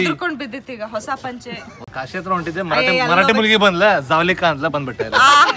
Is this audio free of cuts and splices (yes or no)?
no